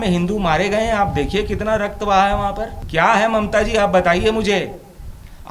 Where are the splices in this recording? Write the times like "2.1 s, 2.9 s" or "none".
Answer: 2.7 s